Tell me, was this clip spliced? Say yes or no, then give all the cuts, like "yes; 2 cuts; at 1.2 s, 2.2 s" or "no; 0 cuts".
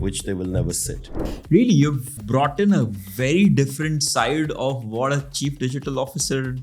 yes; 2 cuts; at 1.2 s, 2.2 s